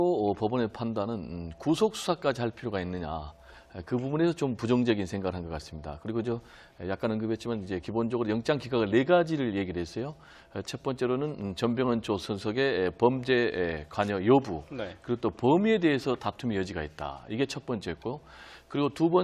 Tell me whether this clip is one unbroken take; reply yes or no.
no